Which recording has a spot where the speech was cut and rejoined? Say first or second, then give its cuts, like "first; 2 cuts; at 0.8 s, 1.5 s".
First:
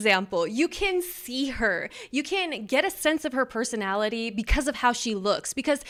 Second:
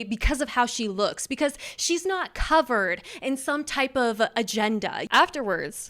second; 1 cut; at 5.0 s